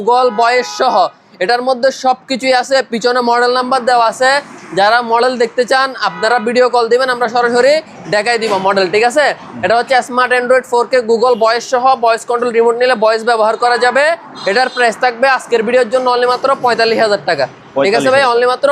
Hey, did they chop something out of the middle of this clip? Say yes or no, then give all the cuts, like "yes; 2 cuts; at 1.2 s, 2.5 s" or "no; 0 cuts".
no; 0 cuts